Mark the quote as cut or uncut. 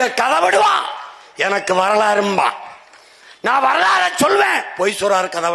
uncut